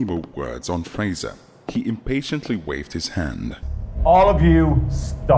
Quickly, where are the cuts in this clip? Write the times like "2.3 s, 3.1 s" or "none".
3.7 s

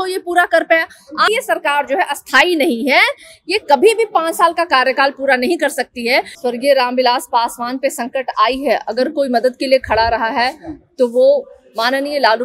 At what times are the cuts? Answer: 1.3 s, 6.3 s

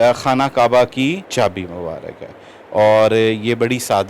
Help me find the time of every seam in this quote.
1.2 s

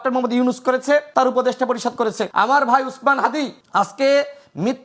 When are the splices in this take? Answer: 1.1 s, 2.2 s, 3.6 s

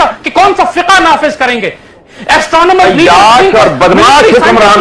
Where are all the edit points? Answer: 2.1 s

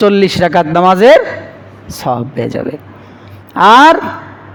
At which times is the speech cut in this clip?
none

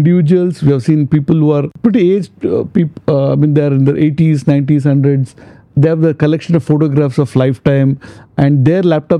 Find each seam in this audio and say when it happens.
1.7 s

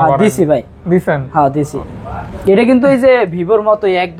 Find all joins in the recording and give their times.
1.7 s

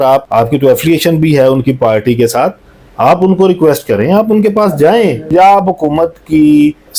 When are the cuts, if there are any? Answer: none

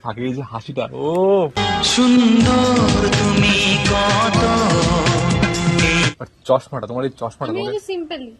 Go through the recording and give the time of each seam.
6.1 s

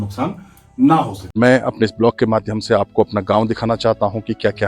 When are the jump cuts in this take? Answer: 1.4 s

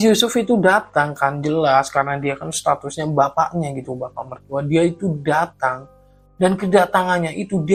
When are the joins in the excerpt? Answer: none

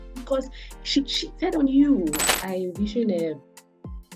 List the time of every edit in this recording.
2.4 s

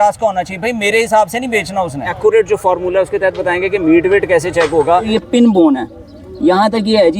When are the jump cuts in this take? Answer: 2.1 s, 5.1 s

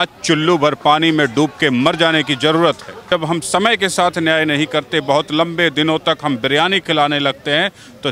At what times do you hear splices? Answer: 3.1 s

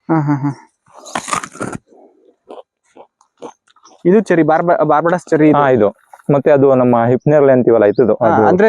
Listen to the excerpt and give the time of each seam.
none

